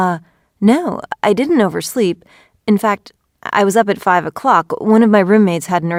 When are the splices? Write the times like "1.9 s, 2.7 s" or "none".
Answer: none